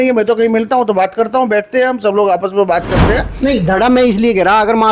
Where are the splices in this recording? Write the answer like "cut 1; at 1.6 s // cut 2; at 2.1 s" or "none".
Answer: cut 1; at 3.3 s